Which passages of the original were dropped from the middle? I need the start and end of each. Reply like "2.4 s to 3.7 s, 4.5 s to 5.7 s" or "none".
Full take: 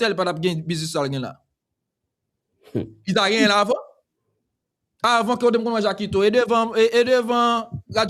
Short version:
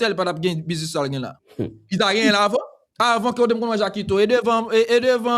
1.4 s to 2.6 s, 4.0 s to 4.8 s